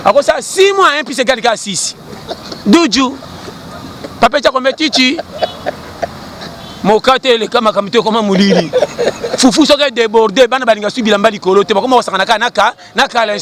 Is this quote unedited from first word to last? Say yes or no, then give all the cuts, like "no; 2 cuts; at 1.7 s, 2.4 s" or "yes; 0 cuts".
yes; 0 cuts